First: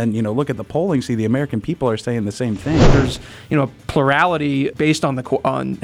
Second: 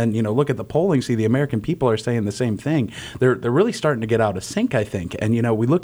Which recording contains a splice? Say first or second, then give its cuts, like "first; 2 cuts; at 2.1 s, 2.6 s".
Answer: first; 2 cuts; at 2.9 s, 4.7 s